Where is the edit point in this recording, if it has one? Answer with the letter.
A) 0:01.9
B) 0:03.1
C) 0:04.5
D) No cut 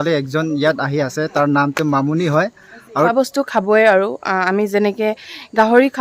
B